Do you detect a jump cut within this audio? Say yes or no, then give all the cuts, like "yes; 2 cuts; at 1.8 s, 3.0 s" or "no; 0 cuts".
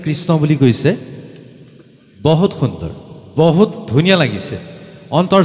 no; 0 cuts